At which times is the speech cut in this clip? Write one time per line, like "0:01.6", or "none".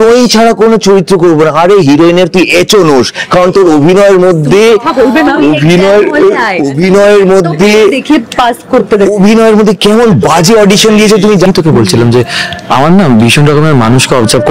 0:11.5